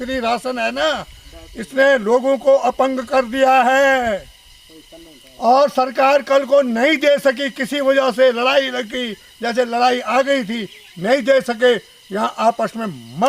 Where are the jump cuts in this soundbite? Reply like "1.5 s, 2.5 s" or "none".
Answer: none